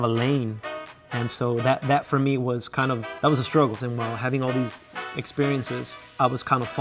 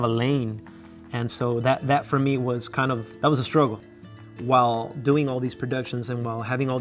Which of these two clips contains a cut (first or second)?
first